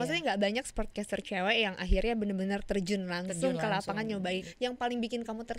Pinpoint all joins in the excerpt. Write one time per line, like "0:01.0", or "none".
0:04.5